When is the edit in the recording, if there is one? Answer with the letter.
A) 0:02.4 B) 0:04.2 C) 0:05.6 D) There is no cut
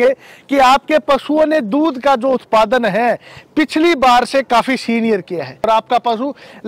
C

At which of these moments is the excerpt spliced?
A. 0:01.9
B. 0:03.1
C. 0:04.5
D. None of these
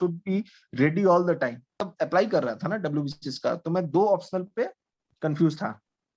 A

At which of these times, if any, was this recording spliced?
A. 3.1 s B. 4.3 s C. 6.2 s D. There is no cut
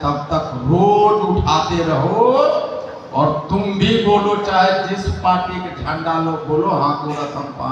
D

